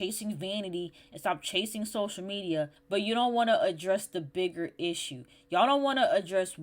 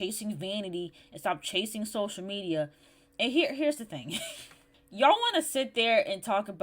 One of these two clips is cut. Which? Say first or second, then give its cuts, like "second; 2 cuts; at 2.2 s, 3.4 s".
first; 1 cut; at 2.8 s